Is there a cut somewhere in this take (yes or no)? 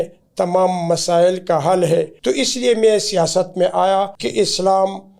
yes